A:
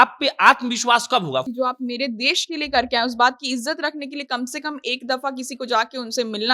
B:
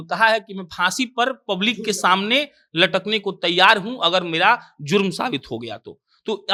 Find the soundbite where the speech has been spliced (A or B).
A